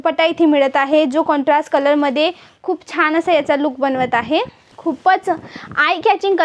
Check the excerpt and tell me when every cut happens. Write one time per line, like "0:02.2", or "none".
0:04.7